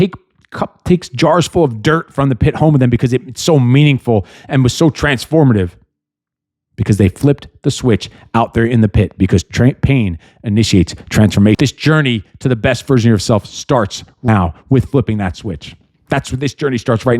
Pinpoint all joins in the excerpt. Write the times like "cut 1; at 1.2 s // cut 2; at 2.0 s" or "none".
cut 1; at 11.6 s // cut 2; at 14.3 s

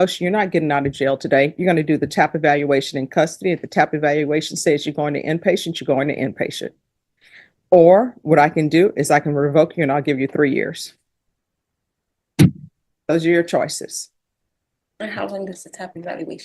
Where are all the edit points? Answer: none

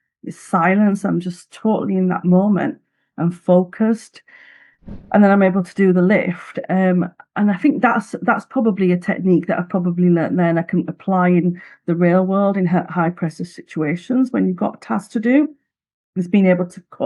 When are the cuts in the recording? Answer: none

